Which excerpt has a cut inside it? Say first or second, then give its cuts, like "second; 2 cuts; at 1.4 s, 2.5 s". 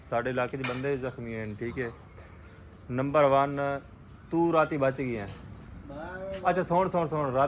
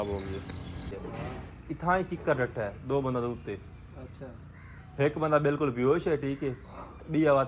second; 1 cut; at 0.9 s